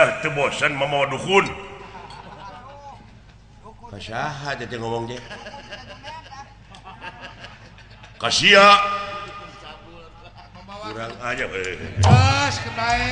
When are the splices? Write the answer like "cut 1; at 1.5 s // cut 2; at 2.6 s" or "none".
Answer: none